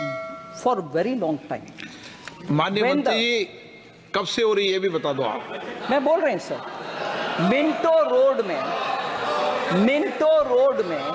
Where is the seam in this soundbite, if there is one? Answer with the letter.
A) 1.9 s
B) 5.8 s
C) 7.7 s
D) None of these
D